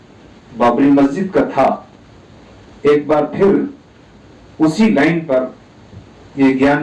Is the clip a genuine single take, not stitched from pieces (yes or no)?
yes